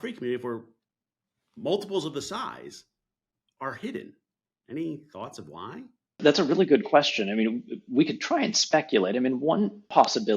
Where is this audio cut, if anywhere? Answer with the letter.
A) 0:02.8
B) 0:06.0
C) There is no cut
B